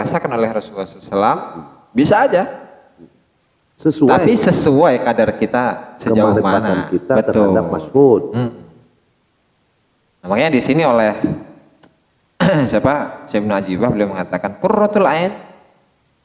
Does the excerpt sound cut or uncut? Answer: uncut